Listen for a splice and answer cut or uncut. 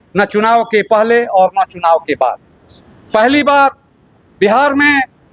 uncut